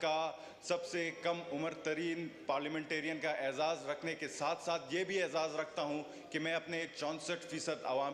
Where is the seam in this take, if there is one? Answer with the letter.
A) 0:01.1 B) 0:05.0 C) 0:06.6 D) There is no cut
D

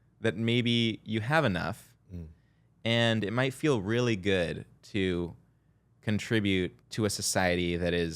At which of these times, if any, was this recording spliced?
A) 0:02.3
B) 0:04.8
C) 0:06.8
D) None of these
C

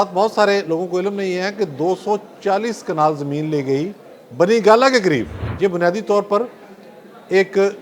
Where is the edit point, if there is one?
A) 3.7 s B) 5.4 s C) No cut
B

